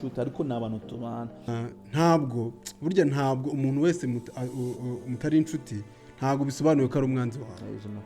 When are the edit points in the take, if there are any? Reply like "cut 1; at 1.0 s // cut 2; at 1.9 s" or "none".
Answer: cut 1; at 1.5 s